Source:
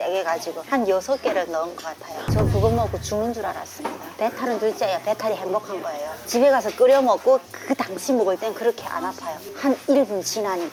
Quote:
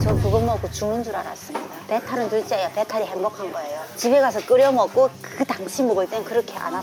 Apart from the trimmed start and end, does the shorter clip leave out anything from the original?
no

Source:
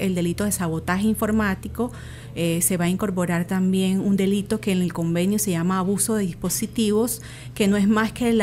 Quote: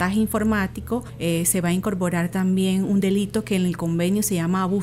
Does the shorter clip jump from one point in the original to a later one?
yes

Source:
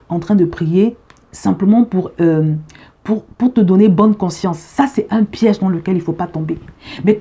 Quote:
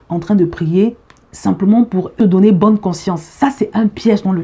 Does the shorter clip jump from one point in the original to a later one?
yes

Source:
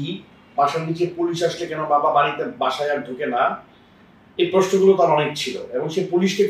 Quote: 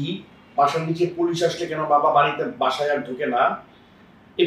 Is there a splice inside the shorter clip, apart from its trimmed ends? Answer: no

